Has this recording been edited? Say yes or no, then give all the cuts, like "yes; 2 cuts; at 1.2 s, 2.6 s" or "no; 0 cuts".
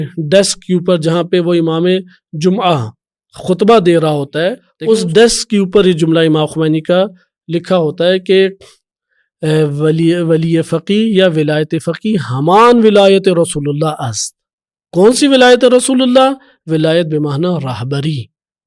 yes; 1 cut; at 4.7 s